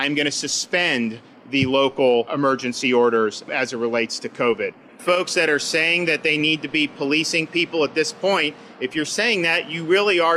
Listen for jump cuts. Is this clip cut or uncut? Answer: cut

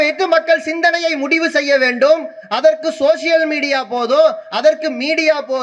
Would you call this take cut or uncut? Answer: uncut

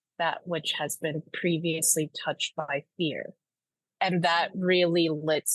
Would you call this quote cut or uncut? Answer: uncut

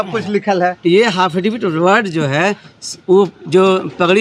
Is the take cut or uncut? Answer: uncut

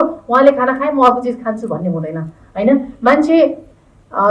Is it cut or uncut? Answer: uncut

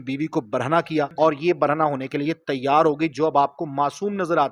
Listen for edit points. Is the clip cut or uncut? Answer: cut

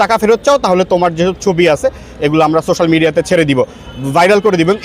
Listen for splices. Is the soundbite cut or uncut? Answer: uncut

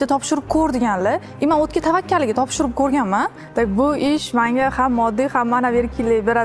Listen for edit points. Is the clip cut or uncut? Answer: cut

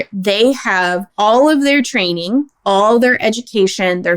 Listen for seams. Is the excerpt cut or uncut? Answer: cut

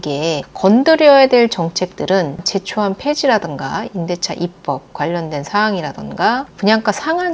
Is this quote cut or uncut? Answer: cut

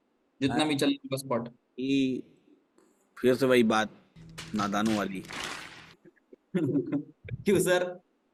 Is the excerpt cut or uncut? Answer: uncut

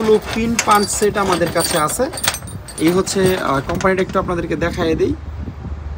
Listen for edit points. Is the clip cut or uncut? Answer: uncut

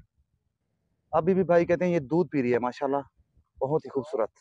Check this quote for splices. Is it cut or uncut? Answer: uncut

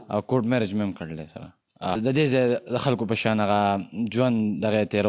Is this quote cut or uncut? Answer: cut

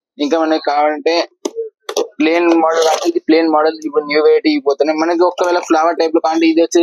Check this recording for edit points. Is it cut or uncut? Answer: uncut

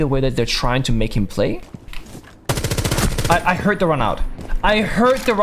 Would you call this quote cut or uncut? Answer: cut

